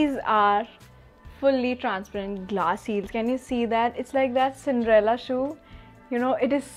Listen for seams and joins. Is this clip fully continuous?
yes; 0 cuts

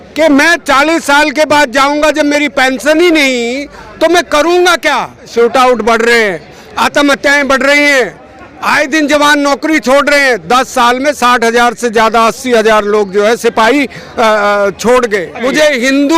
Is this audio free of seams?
no; 2 cuts; at 5.3 s, 15.4 s

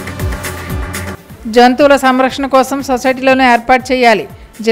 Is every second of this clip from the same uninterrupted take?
no; 1 cut; at 0.9 s

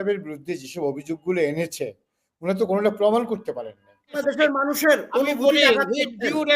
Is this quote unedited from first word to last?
no; 1 cut; at 4.2 s

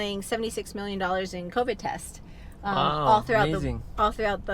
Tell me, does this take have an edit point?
no; 0 cuts

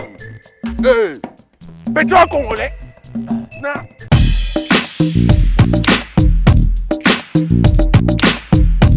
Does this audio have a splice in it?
no; 0 cuts

